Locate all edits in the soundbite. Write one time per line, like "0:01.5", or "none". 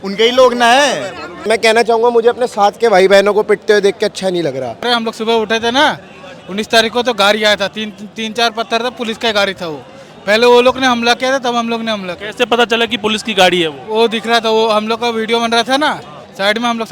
0:01.4
0:04.8